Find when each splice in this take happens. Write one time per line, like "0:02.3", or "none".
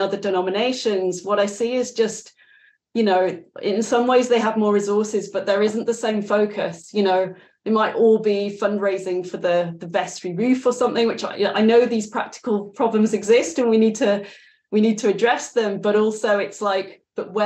none